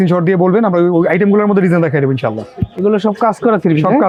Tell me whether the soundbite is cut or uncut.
uncut